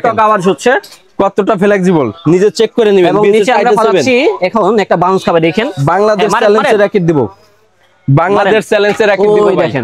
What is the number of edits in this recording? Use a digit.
0